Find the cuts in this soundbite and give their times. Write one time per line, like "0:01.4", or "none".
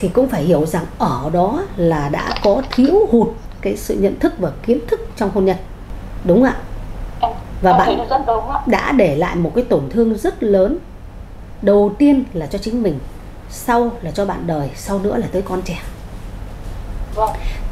none